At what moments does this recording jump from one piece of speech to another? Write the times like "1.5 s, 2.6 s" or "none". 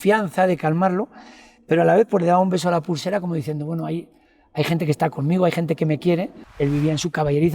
6.4 s